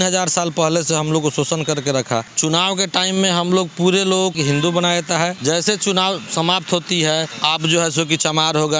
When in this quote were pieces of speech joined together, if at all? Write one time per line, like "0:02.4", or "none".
0:02.3
0:04.3
0:05.4
0:07.3

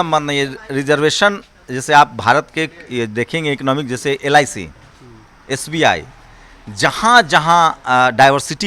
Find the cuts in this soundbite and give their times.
none

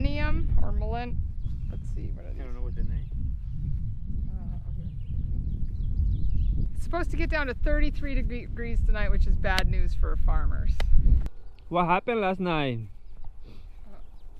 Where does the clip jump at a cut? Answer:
0:06.7
0:11.3

